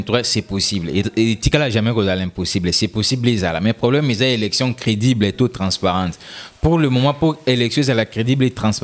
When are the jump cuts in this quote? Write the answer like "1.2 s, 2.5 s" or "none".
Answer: none